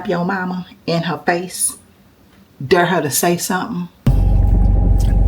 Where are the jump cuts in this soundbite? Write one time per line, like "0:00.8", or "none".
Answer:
0:04.1